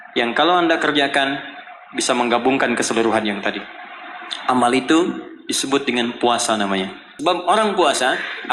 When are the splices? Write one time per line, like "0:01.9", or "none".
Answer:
0:07.0